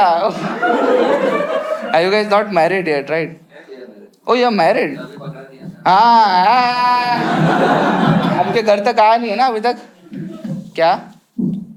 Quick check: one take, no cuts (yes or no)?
yes